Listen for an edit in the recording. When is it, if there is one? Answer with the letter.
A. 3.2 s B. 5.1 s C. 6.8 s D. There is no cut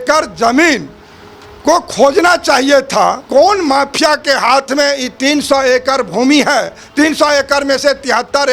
A